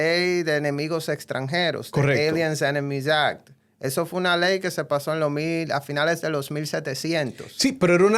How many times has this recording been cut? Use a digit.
0